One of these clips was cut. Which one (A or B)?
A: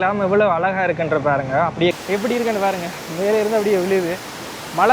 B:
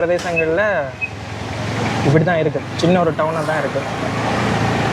A